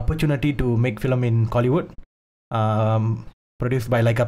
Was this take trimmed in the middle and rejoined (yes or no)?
no